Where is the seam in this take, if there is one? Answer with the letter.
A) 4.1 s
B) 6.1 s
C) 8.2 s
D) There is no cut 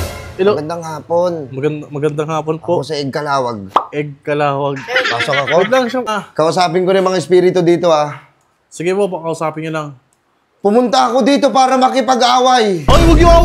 B